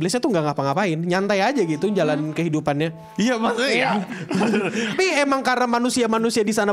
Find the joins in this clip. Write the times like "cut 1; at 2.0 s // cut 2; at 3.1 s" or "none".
cut 1; at 4.9 s